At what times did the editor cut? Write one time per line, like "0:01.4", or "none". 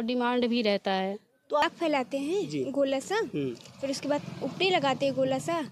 0:01.6